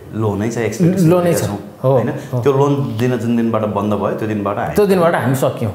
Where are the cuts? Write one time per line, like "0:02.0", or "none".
none

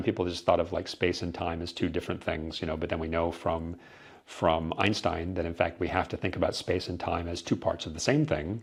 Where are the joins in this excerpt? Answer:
none

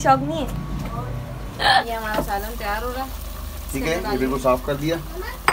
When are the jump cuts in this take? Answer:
0:01.9

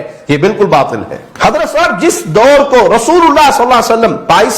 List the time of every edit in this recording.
0:01.2

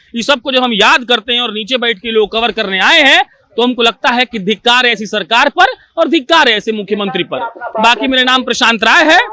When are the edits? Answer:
none

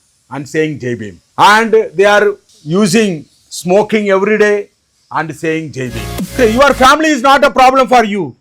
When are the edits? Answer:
0:01.2
0:02.5
0:06.1

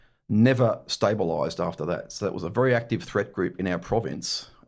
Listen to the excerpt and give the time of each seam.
none

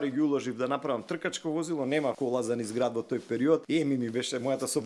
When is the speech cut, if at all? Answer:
0:02.2
0:03.6

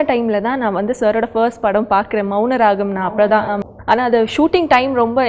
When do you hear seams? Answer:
0:03.6

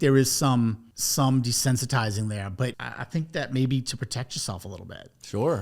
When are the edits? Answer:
0:00.9
0:02.9

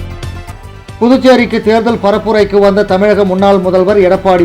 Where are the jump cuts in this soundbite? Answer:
0:01.0

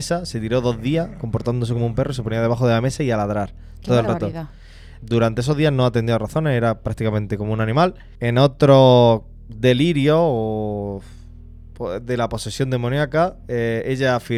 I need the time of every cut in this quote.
none

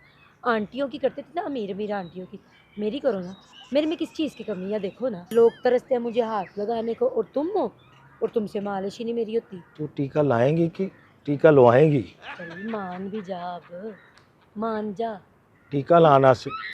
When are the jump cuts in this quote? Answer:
0:05.3
0:09.6

